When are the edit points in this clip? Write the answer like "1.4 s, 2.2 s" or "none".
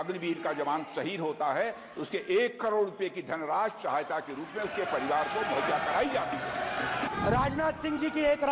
7.1 s